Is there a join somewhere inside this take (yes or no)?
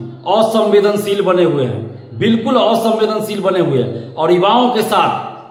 no